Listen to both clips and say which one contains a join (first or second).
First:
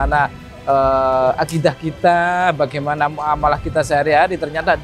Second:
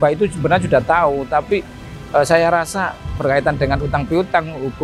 second